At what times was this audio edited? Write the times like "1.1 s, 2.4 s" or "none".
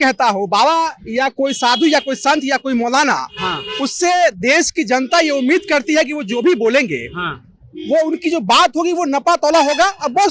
none